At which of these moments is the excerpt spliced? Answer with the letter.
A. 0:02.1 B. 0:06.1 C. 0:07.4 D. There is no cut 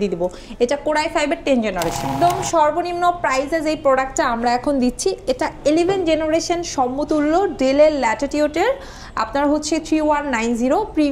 A